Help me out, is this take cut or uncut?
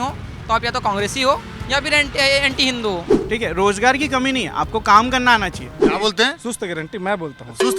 cut